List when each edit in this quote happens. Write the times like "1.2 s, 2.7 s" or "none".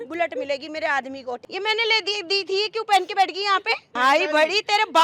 1.4 s, 3.9 s

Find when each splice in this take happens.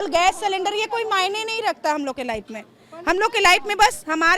none

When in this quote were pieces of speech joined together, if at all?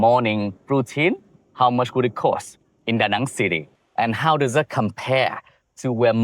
3.8 s

